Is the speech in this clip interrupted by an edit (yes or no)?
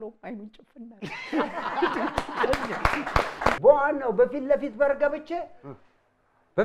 yes